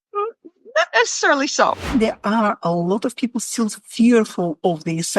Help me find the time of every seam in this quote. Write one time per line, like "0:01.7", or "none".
0:01.9

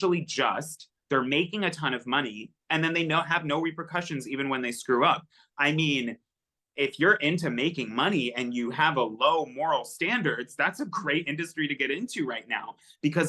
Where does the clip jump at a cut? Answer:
none

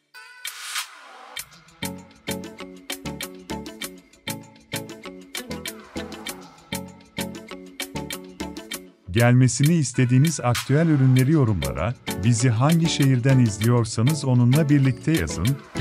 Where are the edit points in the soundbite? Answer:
0:09.0

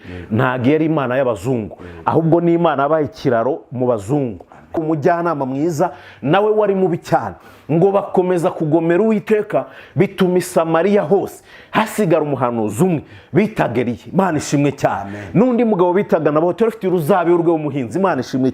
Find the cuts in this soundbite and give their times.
0:04.8

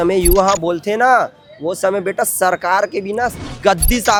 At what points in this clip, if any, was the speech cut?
none

